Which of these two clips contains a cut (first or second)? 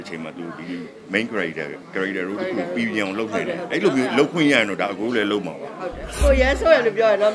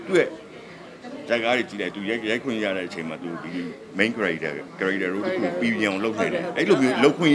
first